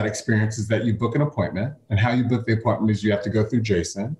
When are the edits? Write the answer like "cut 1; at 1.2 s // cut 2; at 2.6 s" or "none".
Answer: none